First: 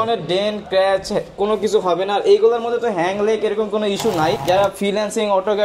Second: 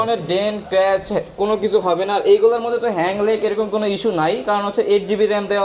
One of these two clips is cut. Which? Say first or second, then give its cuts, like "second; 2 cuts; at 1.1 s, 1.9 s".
first; 1 cut; at 4.4 s